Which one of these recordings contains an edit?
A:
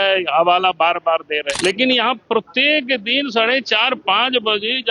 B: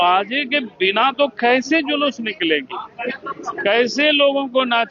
A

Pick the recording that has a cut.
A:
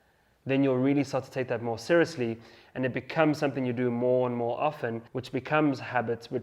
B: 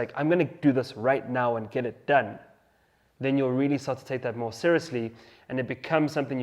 A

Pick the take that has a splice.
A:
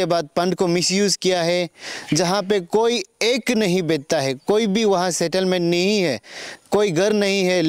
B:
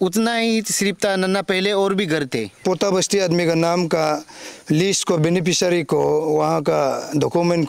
B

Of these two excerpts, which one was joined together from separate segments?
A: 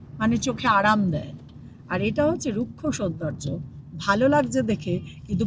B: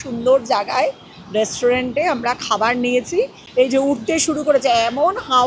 B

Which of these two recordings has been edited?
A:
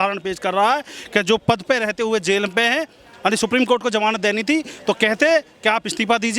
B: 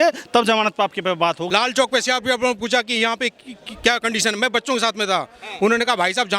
B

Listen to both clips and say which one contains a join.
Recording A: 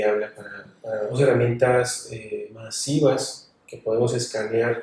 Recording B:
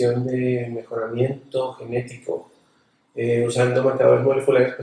A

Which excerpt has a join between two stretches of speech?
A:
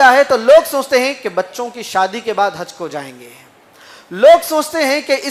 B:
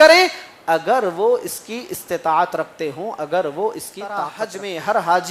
B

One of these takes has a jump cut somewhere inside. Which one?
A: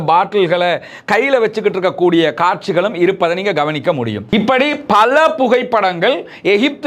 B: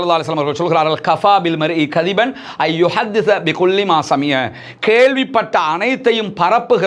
A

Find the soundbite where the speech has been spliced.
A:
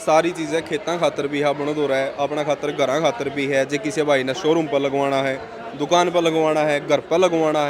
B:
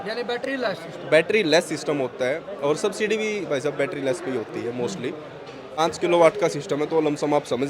B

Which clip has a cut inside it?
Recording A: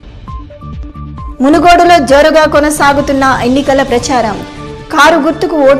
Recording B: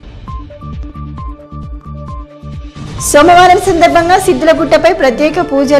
B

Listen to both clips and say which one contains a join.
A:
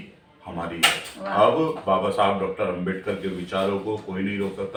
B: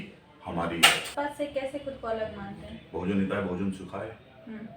B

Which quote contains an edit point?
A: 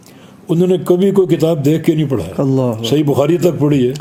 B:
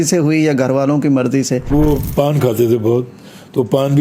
B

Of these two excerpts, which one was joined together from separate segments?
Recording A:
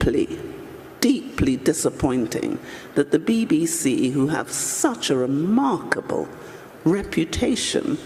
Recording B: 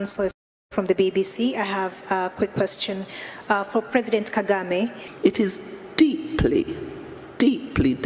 B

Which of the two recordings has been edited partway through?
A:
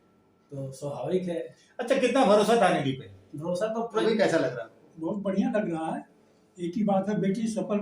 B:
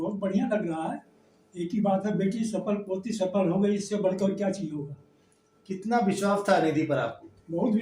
A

